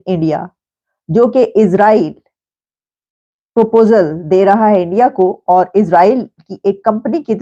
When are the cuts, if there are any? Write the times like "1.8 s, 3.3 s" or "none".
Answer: none